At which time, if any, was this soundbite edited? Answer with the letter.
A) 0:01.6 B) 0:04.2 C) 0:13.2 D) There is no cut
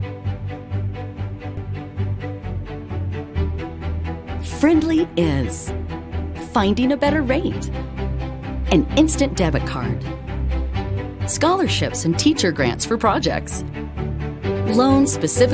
A